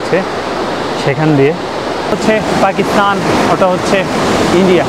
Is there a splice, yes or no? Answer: yes